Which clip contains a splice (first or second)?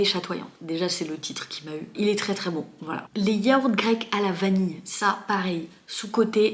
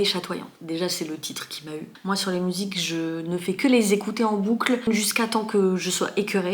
second